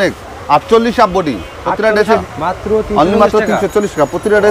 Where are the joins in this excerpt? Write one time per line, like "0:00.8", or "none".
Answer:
0:02.2